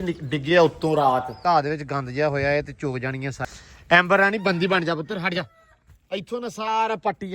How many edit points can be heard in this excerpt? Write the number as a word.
two